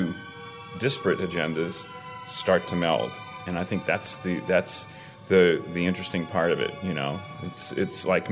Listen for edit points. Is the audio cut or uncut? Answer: uncut